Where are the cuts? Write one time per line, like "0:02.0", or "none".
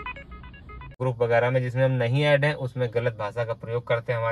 0:01.0